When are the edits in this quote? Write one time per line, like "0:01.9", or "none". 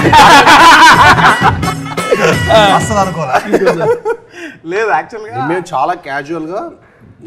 none